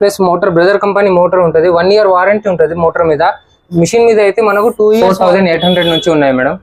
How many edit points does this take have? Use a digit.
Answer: 1